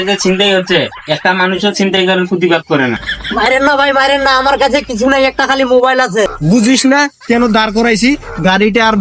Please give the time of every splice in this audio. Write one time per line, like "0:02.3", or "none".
0:03.1
0:06.4